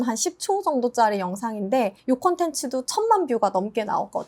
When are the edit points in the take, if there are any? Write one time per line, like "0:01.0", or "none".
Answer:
0:02.0